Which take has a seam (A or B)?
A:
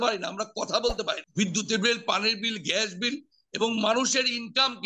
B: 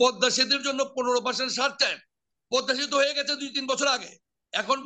A